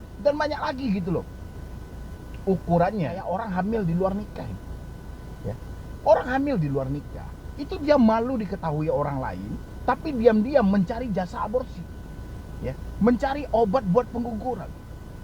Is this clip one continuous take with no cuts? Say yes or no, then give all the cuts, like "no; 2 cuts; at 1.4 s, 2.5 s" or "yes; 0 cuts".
no; 1 cut; at 3.3 s